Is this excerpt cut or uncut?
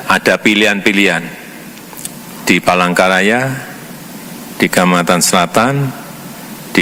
uncut